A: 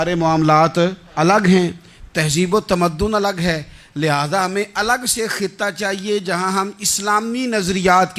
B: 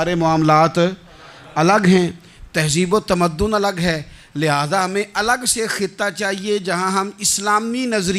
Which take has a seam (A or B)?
A